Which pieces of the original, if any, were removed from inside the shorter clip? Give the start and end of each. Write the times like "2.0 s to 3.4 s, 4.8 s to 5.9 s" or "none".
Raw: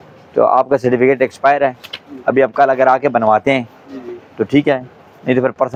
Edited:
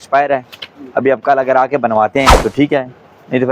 3.7 s to 4.3 s